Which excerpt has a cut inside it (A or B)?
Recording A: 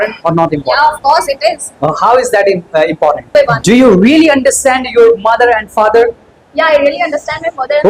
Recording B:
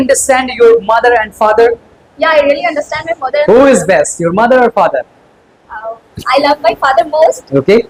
A